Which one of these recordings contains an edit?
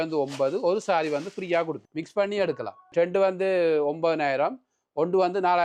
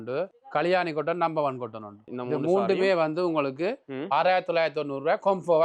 first; 2 cuts; at 1.8 s, 2.9 s

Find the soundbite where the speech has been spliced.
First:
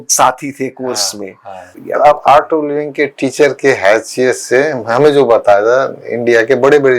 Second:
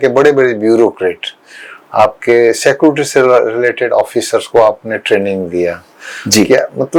first; 1 cut; at 1.7 s

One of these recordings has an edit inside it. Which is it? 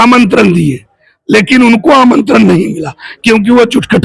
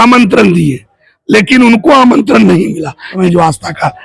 second; 1 cut; at 3.1 s

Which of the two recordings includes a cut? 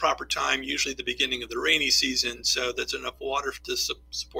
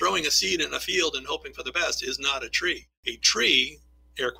second; 1 cut; at 2.6 s

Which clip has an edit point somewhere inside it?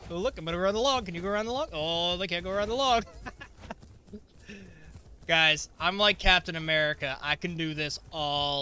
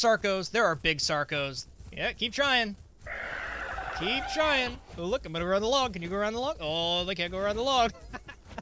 second; 1 cut; at 1.7 s

